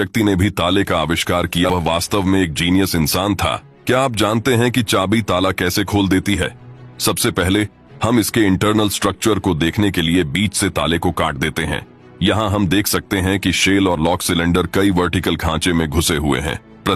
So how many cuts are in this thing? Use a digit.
1